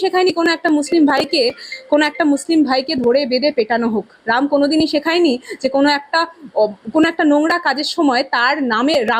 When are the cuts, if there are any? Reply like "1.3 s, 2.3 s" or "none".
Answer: none